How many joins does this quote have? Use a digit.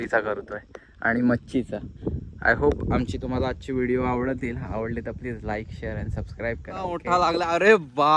1